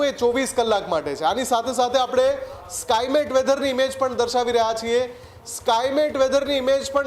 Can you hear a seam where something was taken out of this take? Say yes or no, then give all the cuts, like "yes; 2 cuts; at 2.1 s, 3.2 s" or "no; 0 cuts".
no; 0 cuts